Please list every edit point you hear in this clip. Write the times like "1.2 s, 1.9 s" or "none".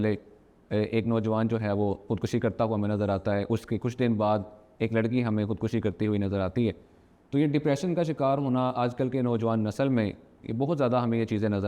none